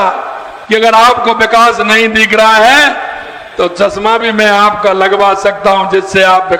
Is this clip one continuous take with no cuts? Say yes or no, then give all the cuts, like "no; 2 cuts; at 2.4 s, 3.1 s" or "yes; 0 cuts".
yes; 0 cuts